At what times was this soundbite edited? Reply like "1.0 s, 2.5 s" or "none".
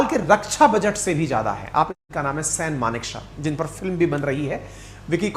2.0 s